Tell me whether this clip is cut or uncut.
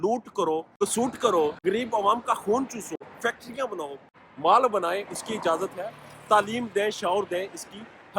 cut